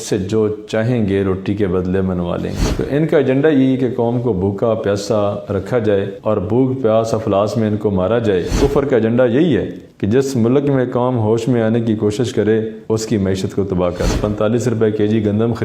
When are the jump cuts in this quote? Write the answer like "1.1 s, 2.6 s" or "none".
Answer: 2.7 s, 8.5 s, 14.2 s